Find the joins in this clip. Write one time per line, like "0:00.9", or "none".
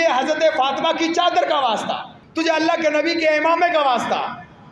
0:02.2